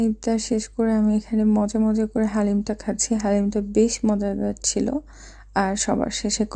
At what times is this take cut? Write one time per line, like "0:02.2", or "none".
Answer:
none